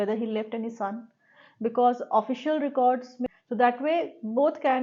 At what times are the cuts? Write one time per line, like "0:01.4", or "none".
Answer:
0:03.2